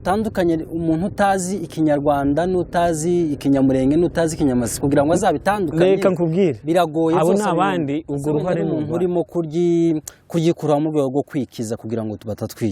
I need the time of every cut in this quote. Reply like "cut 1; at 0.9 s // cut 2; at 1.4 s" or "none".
cut 1; at 8.7 s